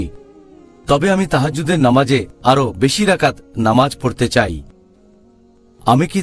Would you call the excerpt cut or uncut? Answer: uncut